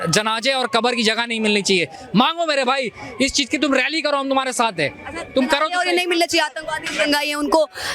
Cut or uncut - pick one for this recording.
uncut